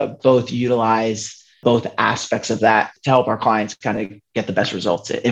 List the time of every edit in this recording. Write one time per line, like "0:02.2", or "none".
0:01.6
0:02.9